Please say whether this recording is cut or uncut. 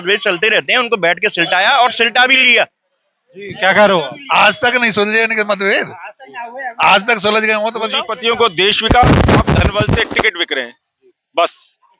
cut